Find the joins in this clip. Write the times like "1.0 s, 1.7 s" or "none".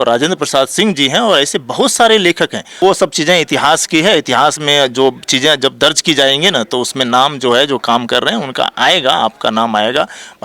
2.8 s